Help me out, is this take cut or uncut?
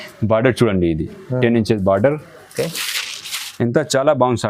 uncut